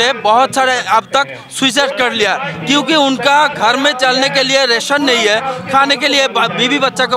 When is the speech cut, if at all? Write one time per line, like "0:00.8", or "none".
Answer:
none